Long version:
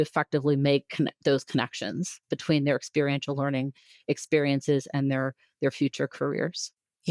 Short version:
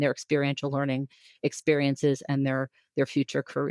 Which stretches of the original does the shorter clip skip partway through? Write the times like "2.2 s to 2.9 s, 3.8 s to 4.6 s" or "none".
none